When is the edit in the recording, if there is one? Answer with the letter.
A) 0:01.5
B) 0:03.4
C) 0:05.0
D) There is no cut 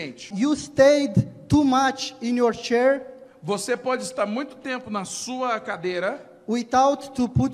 D